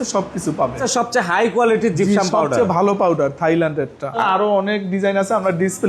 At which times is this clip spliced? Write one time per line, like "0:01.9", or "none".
0:00.8
0:04.2